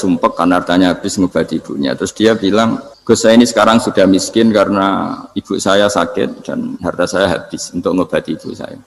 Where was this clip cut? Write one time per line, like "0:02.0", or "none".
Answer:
0:02.9